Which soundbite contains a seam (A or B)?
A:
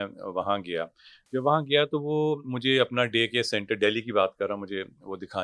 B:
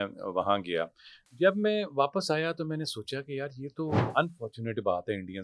B